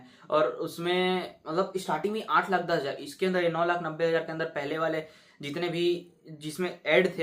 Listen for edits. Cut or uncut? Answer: uncut